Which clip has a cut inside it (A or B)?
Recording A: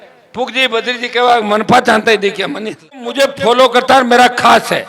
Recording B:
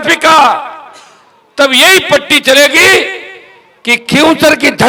A